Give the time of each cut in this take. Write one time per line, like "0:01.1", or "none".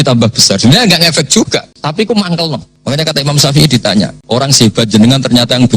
0:01.8
0:02.7
0:04.2

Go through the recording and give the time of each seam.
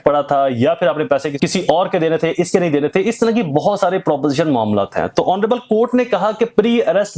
0:01.3

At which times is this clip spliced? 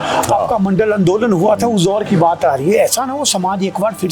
none

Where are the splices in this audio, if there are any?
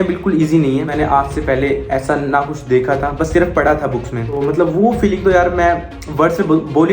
0:00.9
0:04.4

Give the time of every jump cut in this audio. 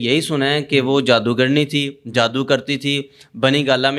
none

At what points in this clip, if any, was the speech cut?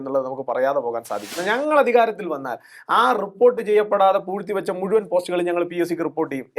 0:01.3

